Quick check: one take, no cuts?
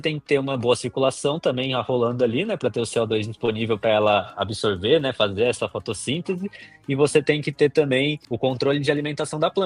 no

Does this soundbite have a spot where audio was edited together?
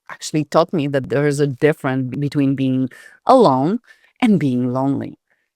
yes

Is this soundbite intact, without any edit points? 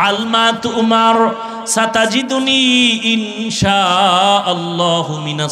yes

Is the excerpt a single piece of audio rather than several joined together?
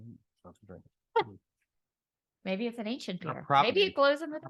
yes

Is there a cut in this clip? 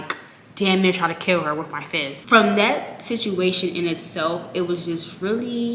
yes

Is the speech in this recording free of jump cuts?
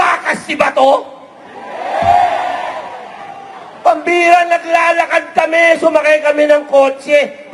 yes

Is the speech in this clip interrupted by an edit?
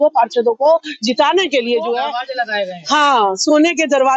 yes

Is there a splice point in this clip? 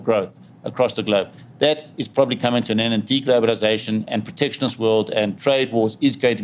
no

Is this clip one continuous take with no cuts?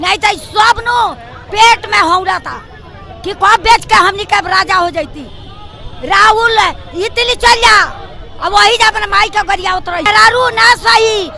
no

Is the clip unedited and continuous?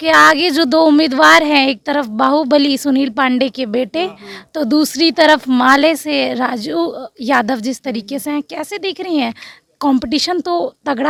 yes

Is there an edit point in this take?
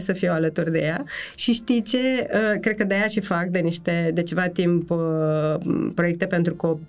no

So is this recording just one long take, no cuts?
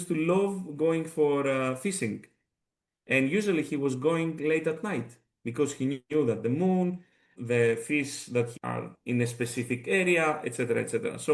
no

